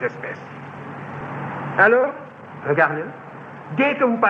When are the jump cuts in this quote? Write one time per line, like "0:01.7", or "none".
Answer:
0:01.1